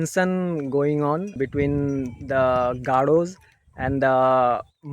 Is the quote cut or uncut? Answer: cut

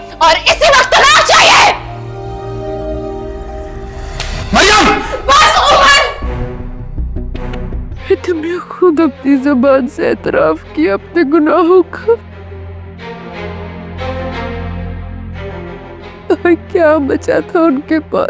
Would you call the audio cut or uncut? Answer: cut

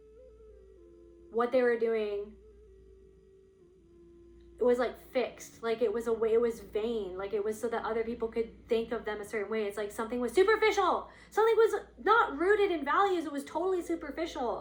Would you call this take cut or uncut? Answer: uncut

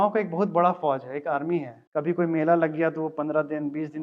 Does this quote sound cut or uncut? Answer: cut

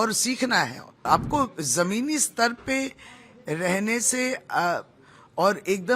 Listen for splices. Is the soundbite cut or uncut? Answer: cut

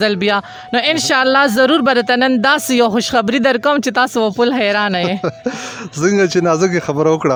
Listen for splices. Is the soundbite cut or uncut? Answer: uncut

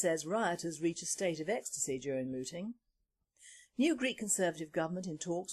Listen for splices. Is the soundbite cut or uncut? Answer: cut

